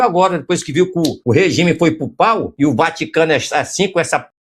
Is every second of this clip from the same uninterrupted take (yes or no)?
no